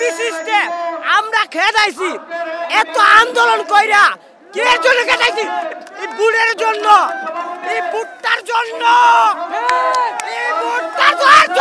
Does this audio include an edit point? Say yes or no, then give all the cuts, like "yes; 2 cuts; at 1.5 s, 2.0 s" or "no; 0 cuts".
no; 0 cuts